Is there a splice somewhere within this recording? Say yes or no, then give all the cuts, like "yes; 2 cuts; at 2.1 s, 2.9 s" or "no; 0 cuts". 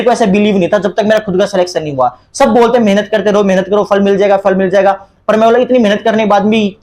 no; 0 cuts